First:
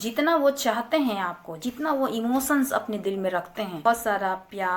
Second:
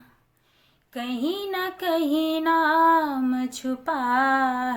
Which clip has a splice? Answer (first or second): first